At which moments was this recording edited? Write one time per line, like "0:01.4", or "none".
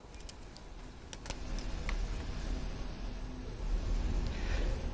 none